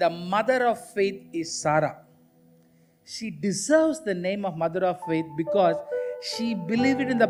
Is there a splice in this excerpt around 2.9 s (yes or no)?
no